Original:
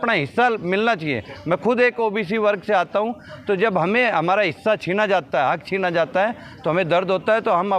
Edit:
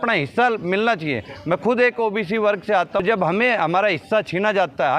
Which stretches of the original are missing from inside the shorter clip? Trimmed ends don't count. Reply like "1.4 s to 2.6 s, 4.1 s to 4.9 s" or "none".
3.0 s to 3.6 s